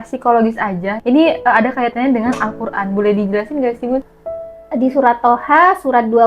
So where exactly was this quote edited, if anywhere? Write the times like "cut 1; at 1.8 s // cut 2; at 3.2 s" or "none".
cut 1; at 0.9 s // cut 2; at 4.1 s